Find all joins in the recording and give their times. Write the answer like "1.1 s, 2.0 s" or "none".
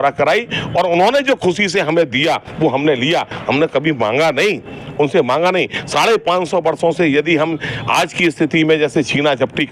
none